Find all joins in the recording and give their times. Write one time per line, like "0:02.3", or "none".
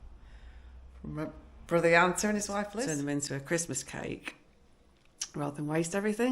0:02.7

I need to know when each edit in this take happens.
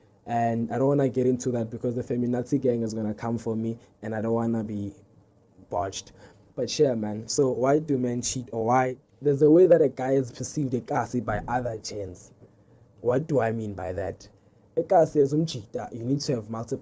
0:09.1

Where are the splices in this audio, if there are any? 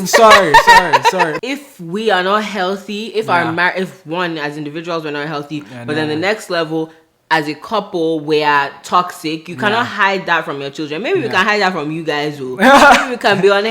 0:01.4

